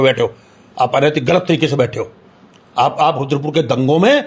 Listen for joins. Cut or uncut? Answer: uncut